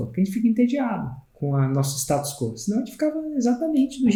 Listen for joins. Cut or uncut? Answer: uncut